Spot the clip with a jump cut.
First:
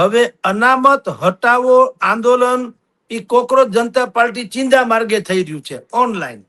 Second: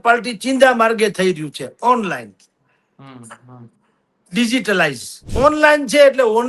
second; 1 cut; at 5.2 s

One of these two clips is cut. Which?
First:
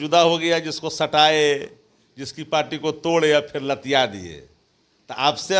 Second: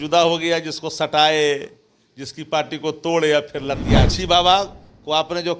second; 1 cut; at 4.1 s

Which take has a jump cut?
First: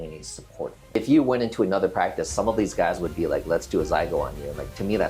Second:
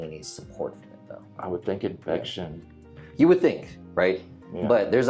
first; 1 cut; at 1.0 s

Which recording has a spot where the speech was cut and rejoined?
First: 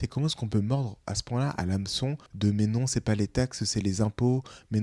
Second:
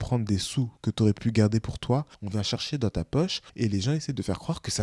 second; 1 cut; at 2.2 s

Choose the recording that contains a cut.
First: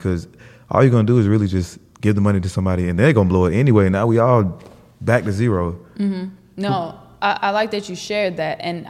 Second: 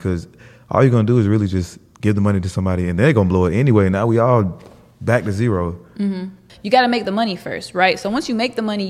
second; 1 cut; at 6.5 s

